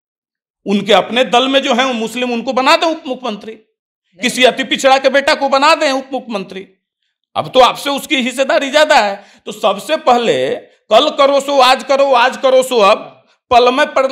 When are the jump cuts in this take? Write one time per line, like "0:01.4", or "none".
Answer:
none